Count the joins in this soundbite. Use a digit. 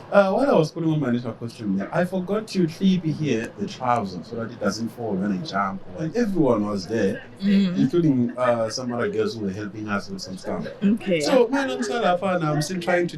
1